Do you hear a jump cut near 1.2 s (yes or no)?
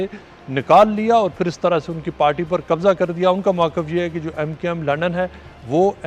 no